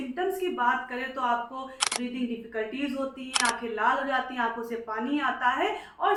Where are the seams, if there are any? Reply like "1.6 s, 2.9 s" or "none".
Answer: none